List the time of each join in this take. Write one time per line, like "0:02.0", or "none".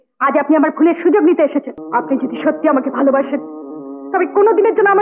0:01.8